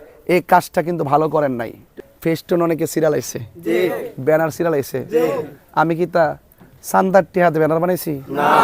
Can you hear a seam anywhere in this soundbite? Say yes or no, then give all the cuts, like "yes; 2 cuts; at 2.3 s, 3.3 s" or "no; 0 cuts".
yes; 1 cut; at 2.0 s